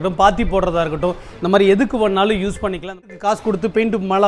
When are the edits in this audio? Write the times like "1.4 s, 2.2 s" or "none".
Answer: 3.0 s